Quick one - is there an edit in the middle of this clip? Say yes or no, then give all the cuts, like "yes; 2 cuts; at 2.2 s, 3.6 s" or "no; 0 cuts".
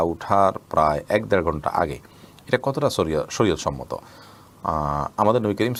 no; 0 cuts